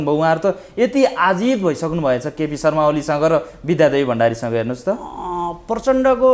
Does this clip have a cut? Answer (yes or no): no